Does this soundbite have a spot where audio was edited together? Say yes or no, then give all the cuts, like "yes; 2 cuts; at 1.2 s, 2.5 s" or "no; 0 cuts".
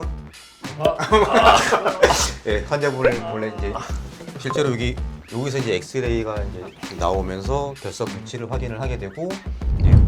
yes; 1 cut; at 4.3 s